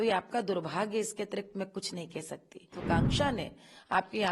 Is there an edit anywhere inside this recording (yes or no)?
yes